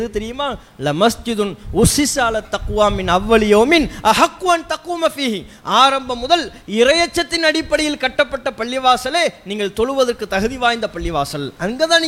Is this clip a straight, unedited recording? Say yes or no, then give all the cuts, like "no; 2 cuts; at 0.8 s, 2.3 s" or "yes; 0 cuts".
yes; 0 cuts